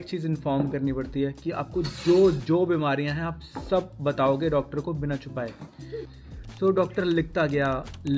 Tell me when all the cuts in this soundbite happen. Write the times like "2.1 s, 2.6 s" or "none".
6.0 s

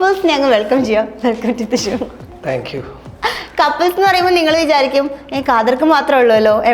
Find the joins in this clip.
none

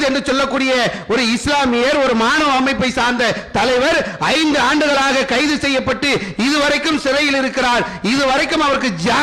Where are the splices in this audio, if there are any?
none

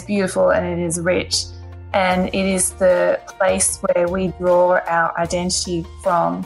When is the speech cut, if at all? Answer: none

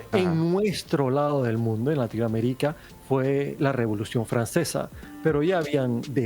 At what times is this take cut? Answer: 2.9 s, 5.0 s

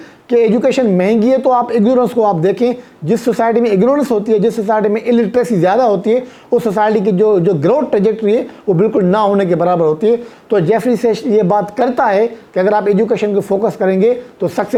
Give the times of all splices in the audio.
none

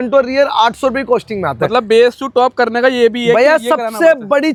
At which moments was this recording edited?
none

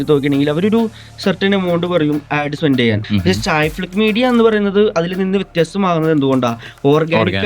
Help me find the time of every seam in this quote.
3.0 s

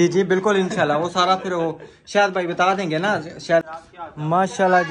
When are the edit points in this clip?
3.6 s

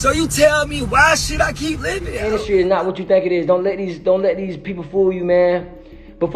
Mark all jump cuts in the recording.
2.1 s

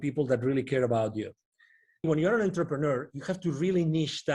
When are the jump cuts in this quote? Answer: 2.1 s

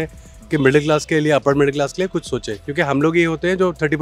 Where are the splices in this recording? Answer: 2.6 s

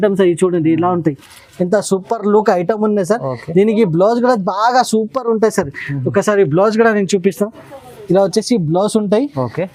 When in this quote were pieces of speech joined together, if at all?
none

